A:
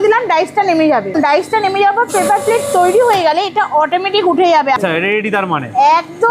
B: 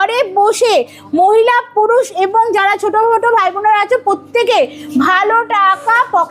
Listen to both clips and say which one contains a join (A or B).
A